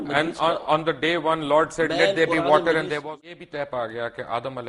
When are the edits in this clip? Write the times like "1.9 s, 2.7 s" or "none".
3.0 s